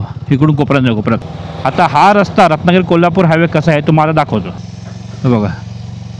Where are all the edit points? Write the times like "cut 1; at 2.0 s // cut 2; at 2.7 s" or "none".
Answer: cut 1; at 1.2 s // cut 2; at 4.7 s